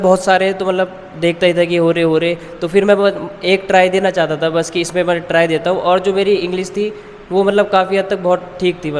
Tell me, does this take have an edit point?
no; 0 cuts

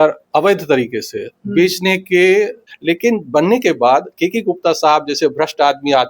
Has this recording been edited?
yes; 1 cut; at 2.7 s

